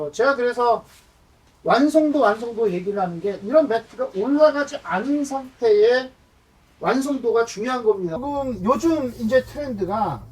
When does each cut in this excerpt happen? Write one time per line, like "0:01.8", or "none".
0:08.2